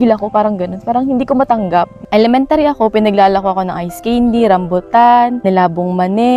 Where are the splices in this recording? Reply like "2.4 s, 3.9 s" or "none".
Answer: 2.0 s, 5.4 s